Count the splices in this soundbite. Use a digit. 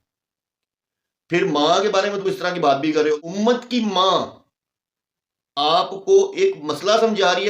1